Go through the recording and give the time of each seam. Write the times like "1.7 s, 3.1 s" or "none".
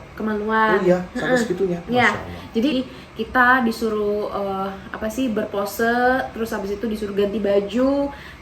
2.7 s